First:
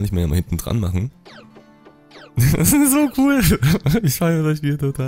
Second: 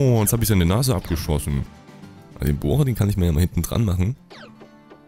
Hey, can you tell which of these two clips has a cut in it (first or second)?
second